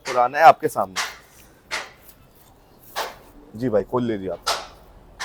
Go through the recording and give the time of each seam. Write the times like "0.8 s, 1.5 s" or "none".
none